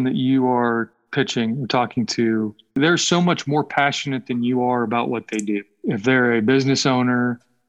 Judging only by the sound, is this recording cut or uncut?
cut